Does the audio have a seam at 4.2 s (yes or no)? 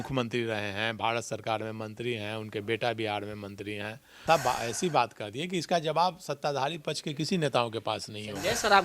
yes